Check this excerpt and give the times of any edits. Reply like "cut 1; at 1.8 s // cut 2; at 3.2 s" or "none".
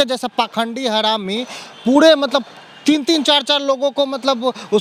none